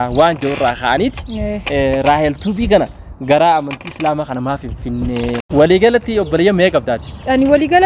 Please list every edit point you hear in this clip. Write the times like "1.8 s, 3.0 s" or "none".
5.4 s